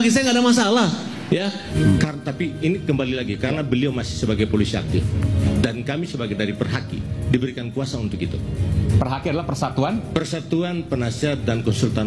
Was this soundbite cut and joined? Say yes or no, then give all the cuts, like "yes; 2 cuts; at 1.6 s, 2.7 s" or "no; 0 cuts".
yes; 1 cut; at 1.6 s